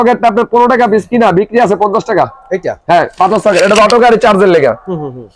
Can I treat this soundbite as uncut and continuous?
yes; 0 cuts

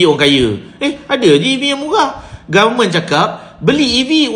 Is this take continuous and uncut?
yes; 0 cuts

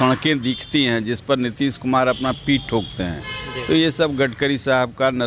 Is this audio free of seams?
yes; 0 cuts

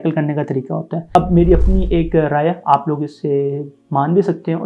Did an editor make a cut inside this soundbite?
yes; 1 cut; at 1.1 s

